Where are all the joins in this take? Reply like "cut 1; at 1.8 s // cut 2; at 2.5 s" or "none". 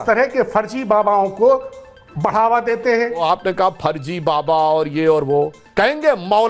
cut 1; at 3.2 s // cut 2; at 5.6 s